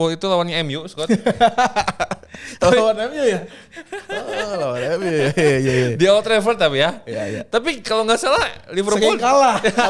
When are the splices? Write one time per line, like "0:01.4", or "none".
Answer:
none